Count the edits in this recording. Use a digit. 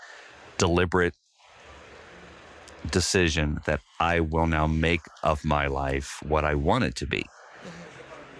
0